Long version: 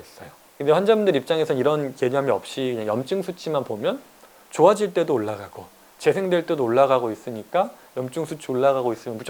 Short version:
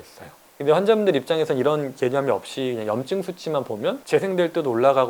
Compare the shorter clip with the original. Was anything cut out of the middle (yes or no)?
yes